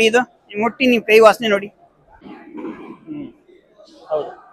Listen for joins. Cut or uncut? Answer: cut